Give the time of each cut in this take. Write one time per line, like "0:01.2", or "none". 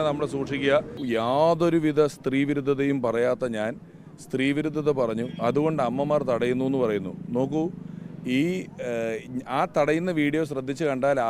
0:01.0

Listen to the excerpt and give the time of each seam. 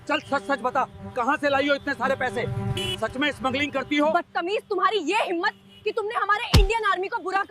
0:04.1

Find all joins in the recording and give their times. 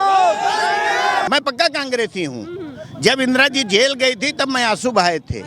0:01.3

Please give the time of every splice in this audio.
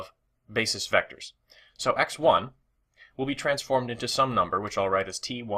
none

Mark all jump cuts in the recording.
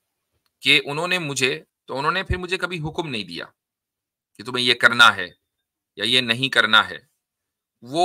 0:01.7

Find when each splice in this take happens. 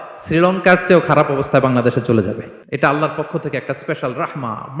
0:02.5

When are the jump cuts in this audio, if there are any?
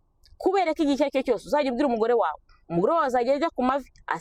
none

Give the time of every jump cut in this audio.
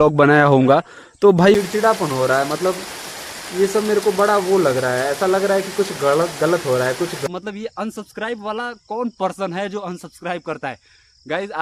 0:01.5
0:07.2

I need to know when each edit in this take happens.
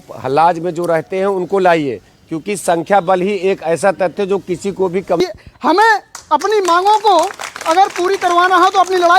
0:05.2

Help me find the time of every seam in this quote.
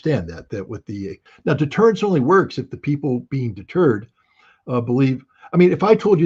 0:01.2

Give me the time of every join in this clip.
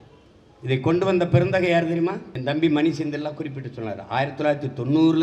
0:02.3

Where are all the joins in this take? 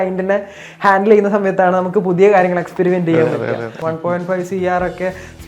0:03.7

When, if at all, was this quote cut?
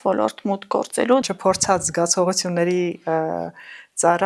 0:01.2

